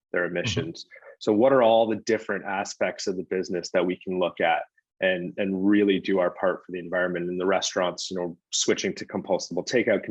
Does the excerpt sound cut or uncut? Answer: uncut